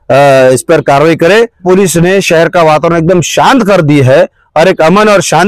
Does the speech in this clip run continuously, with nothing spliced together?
no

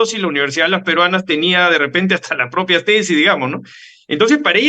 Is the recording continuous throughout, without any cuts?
yes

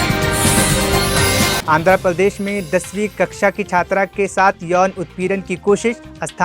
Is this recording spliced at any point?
yes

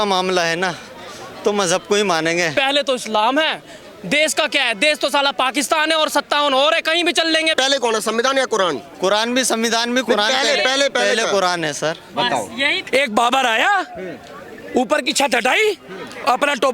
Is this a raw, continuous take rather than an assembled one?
no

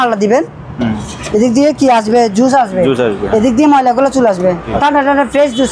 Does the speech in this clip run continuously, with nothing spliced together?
no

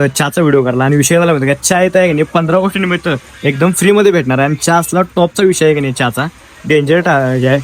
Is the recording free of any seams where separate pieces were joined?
yes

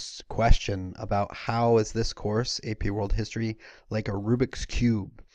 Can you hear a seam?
yes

